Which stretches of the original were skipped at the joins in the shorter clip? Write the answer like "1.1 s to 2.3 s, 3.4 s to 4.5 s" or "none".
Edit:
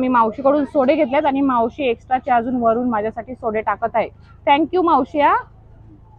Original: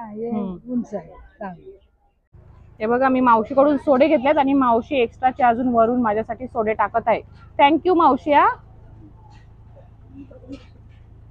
none